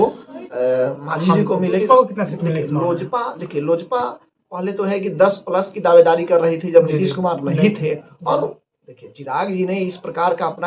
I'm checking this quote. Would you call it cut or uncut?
cut